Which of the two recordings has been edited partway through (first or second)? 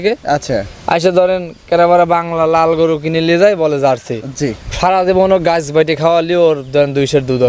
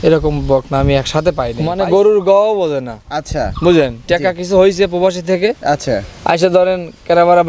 second